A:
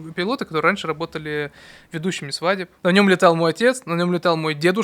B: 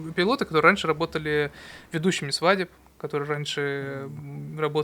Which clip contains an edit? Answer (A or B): A